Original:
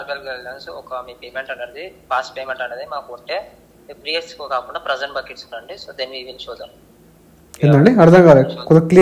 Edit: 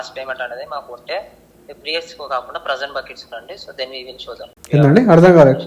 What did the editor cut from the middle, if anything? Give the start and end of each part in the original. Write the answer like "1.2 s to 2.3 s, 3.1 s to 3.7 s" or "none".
6.8 s to 7.5 s